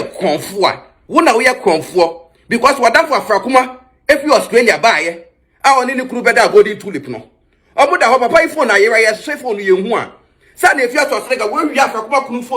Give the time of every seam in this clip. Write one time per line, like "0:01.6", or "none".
0:00.9